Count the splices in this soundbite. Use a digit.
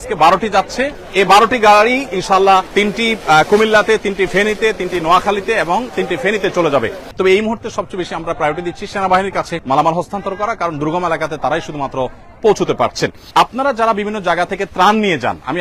5